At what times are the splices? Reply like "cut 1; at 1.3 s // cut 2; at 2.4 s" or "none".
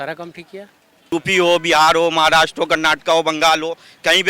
cut 1; at 1.0 s